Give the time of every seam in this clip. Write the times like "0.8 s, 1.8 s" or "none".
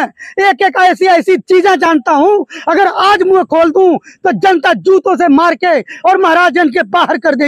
none